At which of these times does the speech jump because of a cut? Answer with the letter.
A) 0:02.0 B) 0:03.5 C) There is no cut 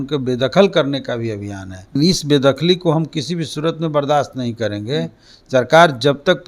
A